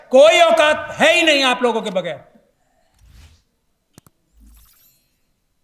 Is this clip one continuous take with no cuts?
yes; 0 cuts

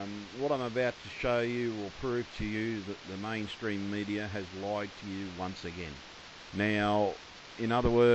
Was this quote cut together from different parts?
yes; 1 cut; at 6.4 s

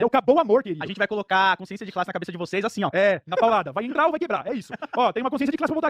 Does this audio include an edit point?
no; 0 cuts

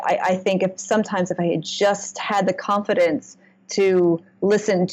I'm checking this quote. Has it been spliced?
no; 0 cuts

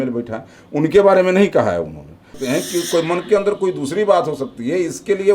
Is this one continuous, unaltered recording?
no; 1 cut; at 2.3 s

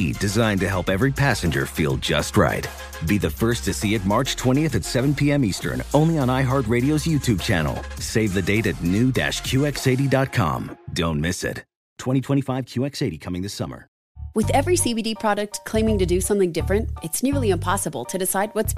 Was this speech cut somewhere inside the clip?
yes; 1 cut; at 14.1 s

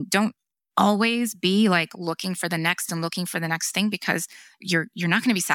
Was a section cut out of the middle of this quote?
no; 0 cuts

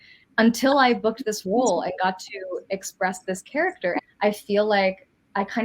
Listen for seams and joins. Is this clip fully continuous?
no; 1 cut; at 4.0 s

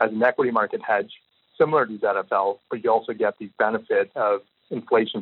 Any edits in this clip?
yes; 1 cut; at 1.5 s

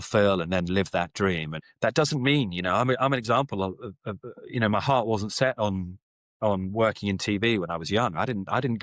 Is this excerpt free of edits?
yes; 0 cuts

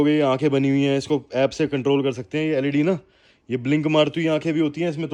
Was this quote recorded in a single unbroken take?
yes; 0 cuts

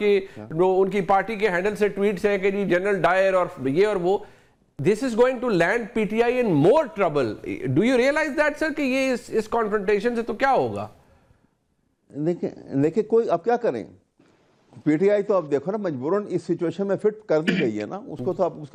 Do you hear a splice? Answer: no; 0 cuts

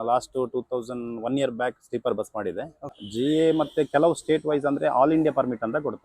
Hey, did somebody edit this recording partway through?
yes; 1 cut; at 3.0 s

